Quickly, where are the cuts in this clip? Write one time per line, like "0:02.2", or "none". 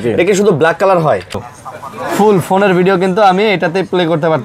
0:01.4

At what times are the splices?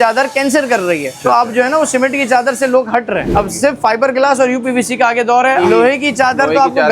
0:01.1
0:03.3
0:05.6

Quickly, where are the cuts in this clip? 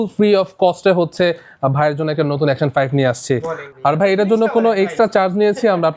0:03.6

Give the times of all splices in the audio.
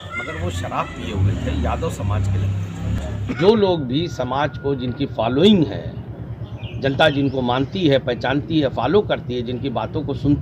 0:03.4

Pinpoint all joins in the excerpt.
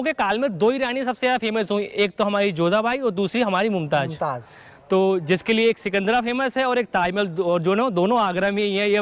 none

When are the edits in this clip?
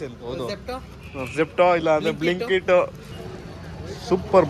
0:03.1

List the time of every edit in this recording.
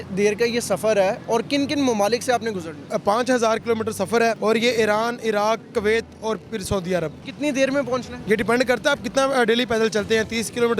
0:02.9
0:04.4
0:07.2
0:08.1

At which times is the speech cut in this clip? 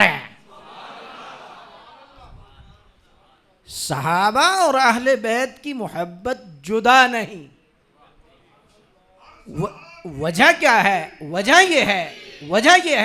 none

